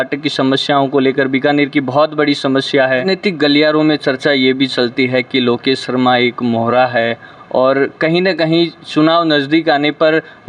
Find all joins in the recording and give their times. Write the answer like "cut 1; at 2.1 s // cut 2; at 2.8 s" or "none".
cut 1; at 3.1 s